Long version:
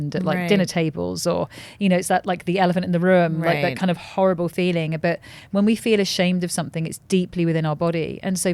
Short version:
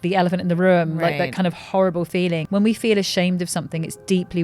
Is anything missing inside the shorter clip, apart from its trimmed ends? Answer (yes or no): yes